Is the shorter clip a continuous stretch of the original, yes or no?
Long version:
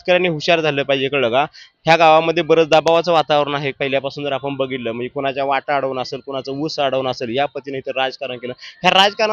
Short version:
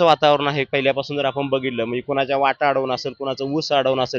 yes